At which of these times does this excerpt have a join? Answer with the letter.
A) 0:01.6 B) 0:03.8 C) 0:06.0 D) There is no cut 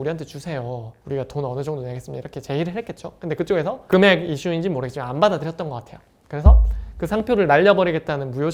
D